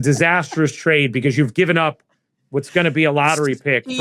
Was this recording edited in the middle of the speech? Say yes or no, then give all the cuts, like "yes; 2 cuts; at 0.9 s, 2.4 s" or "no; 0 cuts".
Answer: no; 0 cuts